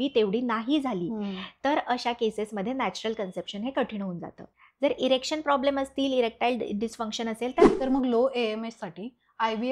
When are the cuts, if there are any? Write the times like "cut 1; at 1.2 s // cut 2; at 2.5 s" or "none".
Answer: cut 1; at 7.7 s